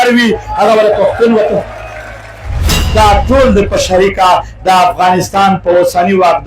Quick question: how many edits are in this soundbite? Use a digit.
1